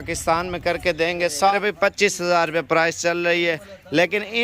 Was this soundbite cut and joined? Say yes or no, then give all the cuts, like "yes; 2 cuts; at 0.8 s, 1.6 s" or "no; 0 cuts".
yes; 1 cut; at 1.5 s